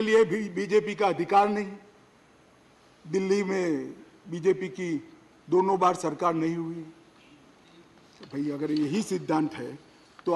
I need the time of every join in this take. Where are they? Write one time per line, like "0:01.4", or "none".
none